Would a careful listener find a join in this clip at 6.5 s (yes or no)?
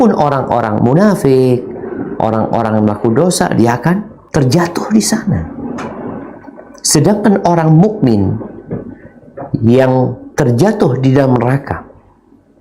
no